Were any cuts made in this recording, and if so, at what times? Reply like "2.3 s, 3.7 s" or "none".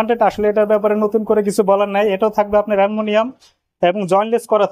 none